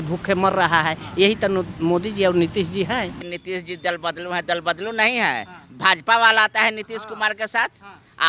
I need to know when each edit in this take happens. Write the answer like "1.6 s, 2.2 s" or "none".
3.2 s